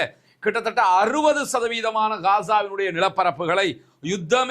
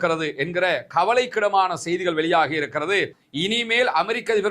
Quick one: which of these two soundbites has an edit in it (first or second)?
second